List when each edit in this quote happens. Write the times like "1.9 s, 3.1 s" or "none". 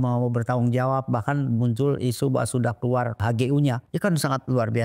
3.2 s, 3.8 s